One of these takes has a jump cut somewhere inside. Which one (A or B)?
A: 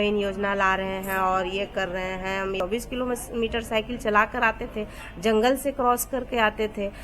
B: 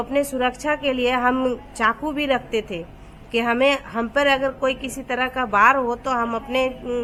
A